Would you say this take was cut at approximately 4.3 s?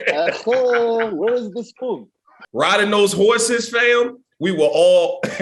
no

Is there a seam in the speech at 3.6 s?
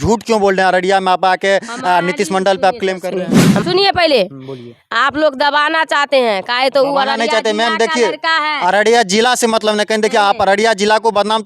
yes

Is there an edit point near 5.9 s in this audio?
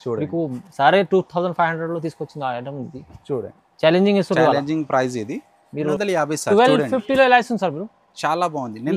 yes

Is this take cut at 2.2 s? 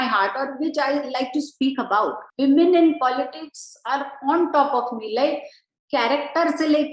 yes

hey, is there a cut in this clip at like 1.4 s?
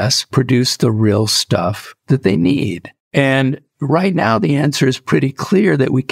no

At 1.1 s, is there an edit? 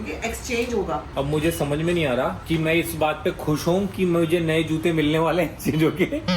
yes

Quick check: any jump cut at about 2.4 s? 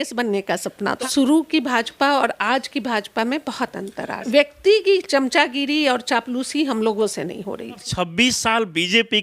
no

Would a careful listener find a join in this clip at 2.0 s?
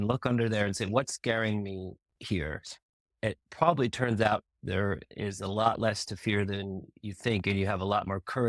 no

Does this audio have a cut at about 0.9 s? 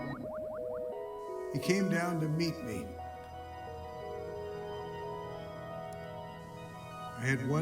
yes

